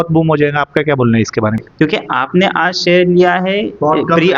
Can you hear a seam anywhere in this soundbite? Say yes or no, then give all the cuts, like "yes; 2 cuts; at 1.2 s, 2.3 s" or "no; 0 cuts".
yes; 1 cut; at 1.6 s